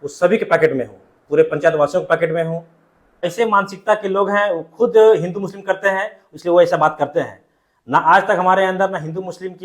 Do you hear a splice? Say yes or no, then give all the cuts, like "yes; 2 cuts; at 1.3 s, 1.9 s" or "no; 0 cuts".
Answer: yes; 1 cut; at 3.2 s